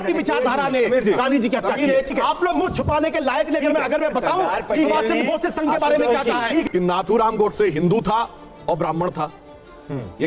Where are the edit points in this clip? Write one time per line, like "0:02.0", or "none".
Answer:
0:02.1
0:06.7